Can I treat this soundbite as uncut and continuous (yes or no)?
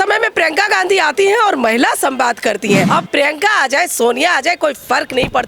no